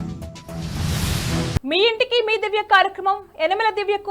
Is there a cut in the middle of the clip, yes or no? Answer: yes